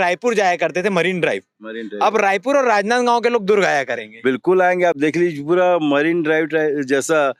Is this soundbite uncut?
yes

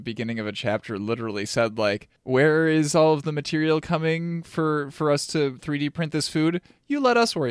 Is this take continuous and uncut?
no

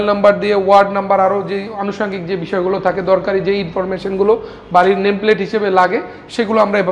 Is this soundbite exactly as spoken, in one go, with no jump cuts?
yes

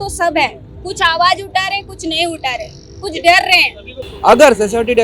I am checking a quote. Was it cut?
yes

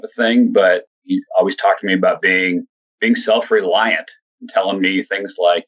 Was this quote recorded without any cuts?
no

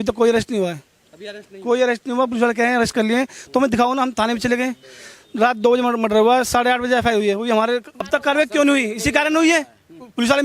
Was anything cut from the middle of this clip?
yes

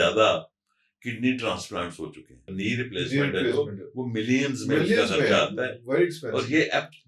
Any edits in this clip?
yes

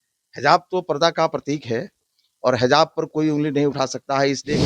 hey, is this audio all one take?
yes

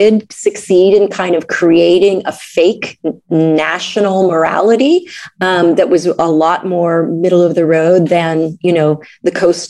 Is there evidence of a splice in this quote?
no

